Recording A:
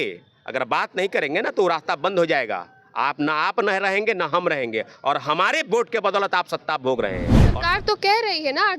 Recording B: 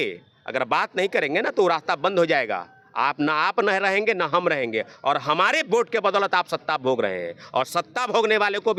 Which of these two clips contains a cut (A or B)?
A